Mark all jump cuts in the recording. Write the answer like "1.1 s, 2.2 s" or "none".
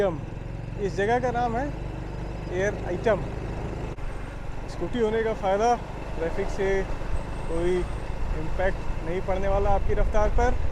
4.0 s

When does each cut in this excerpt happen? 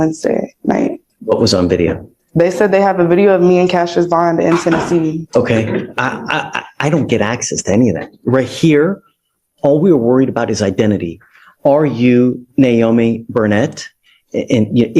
1.1 s, 5.2 s

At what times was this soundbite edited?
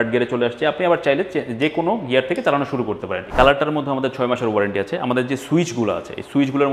3.3 s

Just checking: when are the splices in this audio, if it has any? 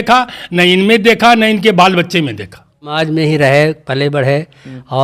2.9 s

